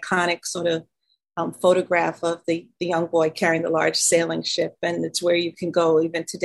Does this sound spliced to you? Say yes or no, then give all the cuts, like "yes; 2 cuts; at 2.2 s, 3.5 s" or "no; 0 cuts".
no; 0 cuts